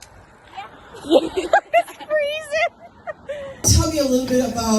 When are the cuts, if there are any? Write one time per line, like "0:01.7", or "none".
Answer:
0:03.6